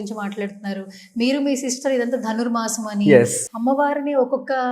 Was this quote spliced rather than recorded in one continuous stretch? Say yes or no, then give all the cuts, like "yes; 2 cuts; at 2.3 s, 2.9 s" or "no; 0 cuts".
yes; 1 cut; at 3.4 s